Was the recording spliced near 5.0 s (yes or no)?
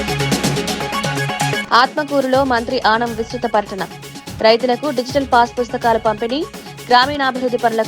no